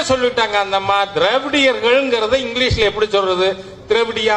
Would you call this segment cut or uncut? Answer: uncut